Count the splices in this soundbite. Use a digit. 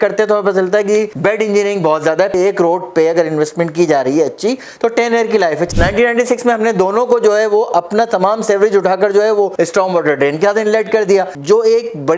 3